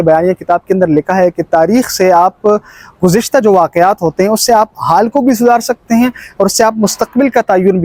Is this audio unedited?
yes; 0 cuts

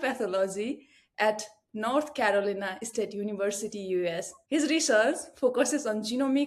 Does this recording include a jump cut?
no; 0 cuts

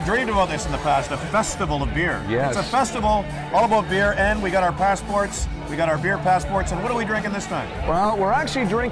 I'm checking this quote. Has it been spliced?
no; 0 cuts

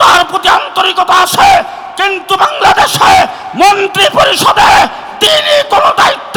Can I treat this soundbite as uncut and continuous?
yes; 0 cuts

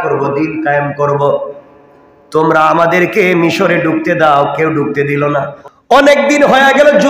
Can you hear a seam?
yes; 1 cut; at 5.6 s

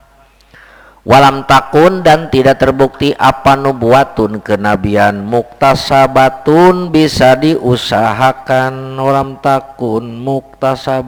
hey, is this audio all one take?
yes; 0 cuts

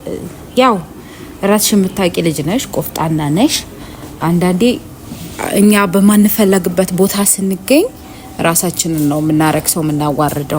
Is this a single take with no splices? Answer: yes; 0 cuts

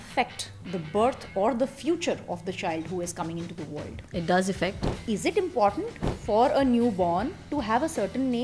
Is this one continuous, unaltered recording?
no; 2 cuts; at 4.0 s, 4.9 s

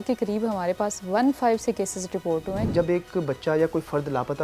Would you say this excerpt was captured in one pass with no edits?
no; 1 cut; at 2.7 s

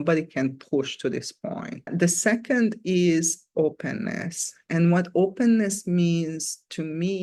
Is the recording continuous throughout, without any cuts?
yes; 0 cuts

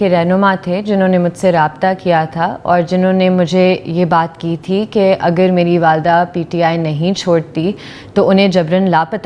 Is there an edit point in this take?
no; 0 cuts

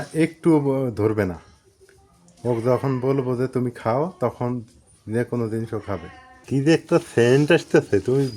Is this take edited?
yes; 1 cut; at 6.4 s

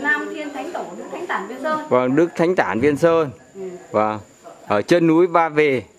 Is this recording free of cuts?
yes; 0 cuts

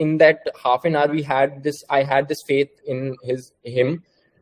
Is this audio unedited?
yes; 0 cuts

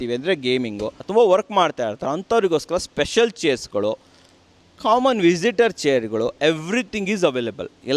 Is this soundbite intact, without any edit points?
no; 1 cut; at 1.0 s

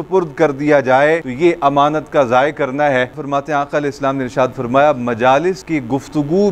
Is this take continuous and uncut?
no; 3 cuts; at 1.3 s, 3.2 s, 5.6 s

